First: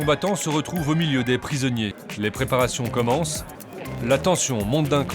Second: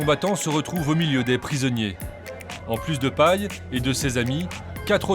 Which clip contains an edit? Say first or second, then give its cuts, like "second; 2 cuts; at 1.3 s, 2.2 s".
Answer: first; 1 cut; at 2.0 s